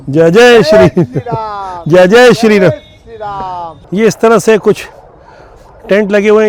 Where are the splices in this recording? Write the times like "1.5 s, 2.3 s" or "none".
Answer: none